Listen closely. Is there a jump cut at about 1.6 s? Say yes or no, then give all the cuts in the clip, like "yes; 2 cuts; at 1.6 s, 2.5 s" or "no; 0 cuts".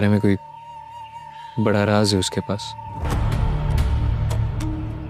no; 0 cuts